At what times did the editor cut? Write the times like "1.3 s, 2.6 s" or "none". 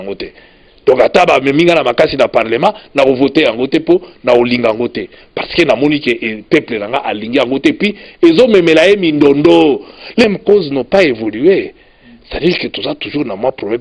10.2 s